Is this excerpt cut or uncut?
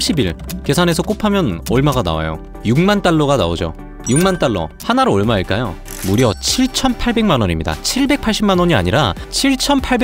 uncut